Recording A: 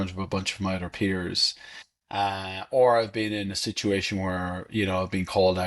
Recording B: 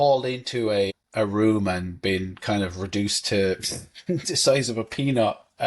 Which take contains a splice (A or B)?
B